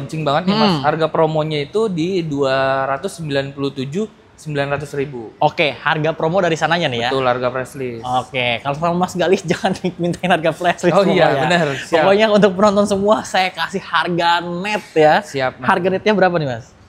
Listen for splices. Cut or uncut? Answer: uncut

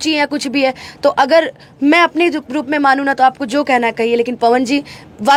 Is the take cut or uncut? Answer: uncut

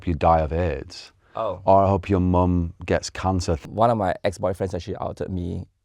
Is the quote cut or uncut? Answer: cut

